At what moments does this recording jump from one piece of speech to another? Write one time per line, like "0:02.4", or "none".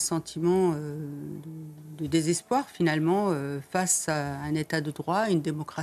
none